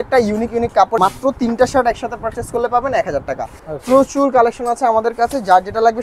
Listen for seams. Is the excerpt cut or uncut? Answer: cut